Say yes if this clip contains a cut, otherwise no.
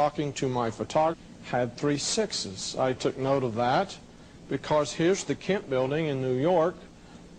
no